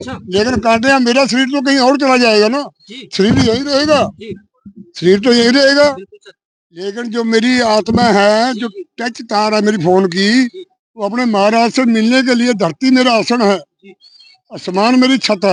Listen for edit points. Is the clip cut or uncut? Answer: uncut